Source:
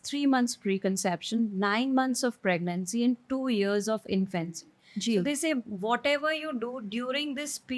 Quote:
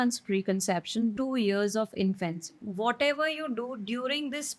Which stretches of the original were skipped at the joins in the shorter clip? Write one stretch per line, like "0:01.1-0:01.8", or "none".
0:01.5-0:03.3
0:04.8-0:05.7